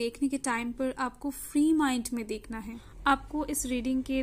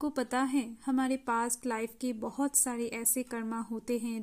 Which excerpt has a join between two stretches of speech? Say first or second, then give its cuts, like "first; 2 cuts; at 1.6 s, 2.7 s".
first; 1 cut; at 2.8 s